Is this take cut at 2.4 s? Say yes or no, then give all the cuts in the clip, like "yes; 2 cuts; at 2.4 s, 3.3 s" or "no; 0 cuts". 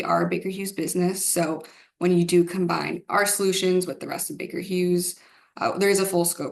no; 0 cuts